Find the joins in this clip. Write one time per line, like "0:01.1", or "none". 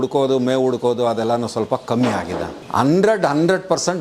0:02.6

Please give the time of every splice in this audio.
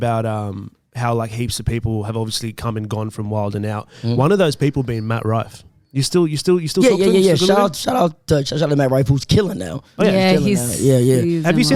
none

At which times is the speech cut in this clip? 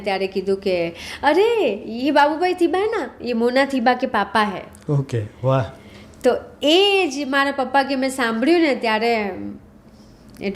none

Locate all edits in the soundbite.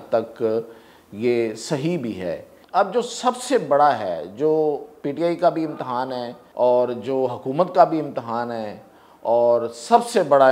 0:02.5
0:06.4

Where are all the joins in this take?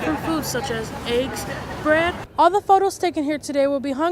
0:02.2

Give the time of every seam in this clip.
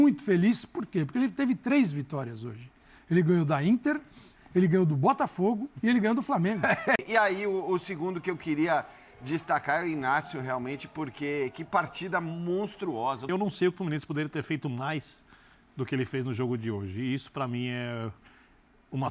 0:07.0
0:13.2

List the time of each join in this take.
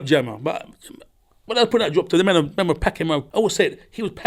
0:03.3

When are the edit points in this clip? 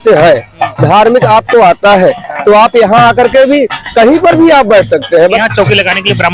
0:05.4

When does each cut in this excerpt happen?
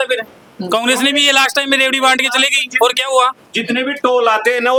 none

